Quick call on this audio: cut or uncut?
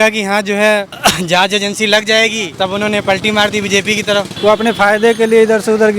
cut